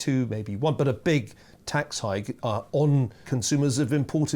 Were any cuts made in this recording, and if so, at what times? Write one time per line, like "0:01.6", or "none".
0:03.2